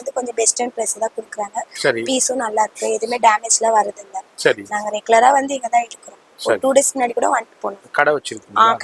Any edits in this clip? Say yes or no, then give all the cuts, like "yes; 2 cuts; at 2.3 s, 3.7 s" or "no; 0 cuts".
no; 0 cuts